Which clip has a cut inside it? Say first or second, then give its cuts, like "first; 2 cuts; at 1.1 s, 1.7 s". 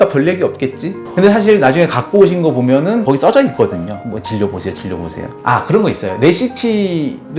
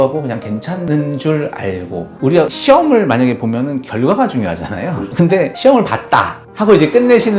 first; 1 cut; at 5.3 s